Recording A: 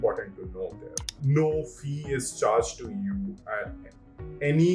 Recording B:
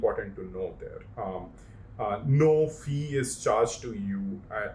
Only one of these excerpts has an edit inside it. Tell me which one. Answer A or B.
A